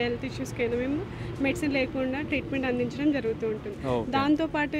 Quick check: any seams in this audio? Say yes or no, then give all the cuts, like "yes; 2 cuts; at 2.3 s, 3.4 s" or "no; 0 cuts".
no; 0 cuts